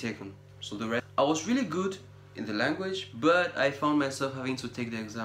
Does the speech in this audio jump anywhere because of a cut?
yes; 1 cut; at 1.1 s

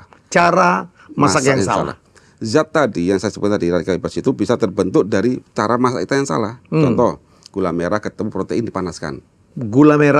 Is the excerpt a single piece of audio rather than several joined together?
yes; 0 cuts

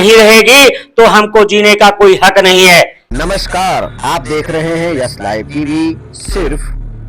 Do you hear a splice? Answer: yes; 1 cut; at 3.0 s

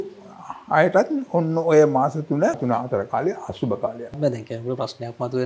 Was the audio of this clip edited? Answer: yes; 2 cuts; at 2.6 s, 4.2 s

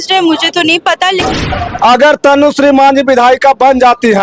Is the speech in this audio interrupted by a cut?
yes; 1 cut; at 1.3 s

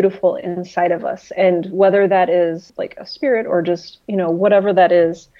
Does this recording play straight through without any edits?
no; 1 cut; at 2.7 s

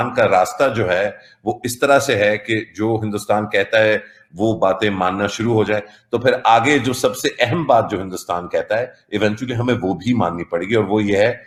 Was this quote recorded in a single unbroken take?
yes; 0 cuts

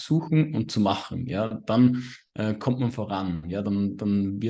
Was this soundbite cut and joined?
no; 0 cuts

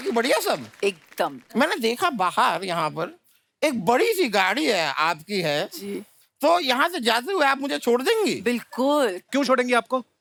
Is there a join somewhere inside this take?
no; 0 cuts

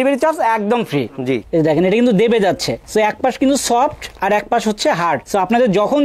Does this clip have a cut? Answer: yes; 1 cut; at 1.4 s

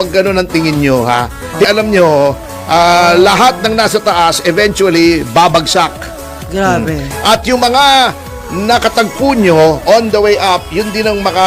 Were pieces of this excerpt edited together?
yes; 1 cut; at 1.7 s

